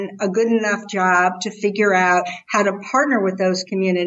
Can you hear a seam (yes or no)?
no